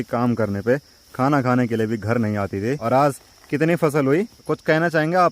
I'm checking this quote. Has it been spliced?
yes; 2 cuts; at 2.8 s, 4.4 s

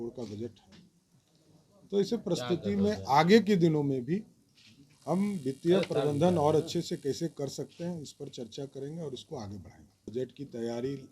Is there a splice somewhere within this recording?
yes; 1 cut; at 10.0 s

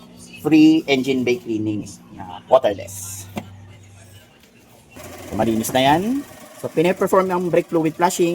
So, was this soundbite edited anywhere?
yes; 1 cut; at 5.0 s

